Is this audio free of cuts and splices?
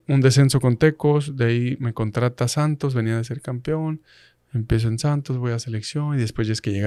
yes; 0 cuts

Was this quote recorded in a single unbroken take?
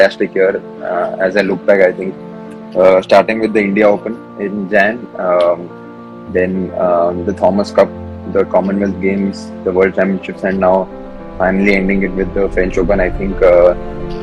yes; 0 cuts

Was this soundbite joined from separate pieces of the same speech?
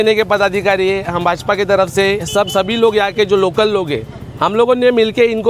no; 0 cuts

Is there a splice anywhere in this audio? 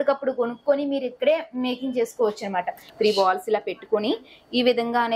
yes; 1 cut; at 2.9 s

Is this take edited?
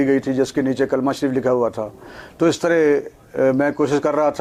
no; 0 cuts

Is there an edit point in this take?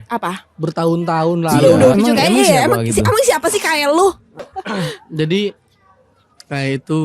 yes; 2 cuts; at 1.9 s, 4.5 s

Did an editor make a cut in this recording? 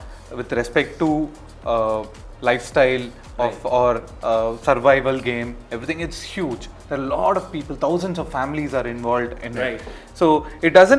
no; 0 cuts

